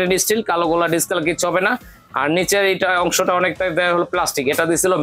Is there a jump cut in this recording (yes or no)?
no